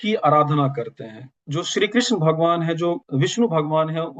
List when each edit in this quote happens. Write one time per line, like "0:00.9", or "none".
0:01.3
0:03.1